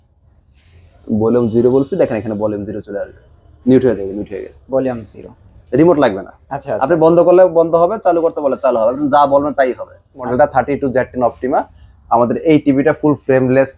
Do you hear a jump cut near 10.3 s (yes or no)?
yes